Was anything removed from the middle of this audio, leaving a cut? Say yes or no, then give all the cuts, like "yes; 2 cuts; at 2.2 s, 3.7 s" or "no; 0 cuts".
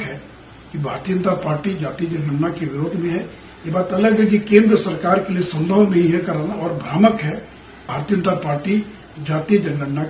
yes; 1 cut; at 6.7 s